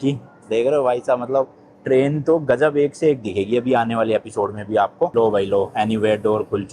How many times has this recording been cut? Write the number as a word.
one